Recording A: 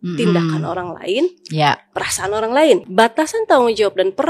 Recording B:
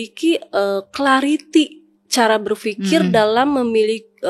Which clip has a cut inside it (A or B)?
A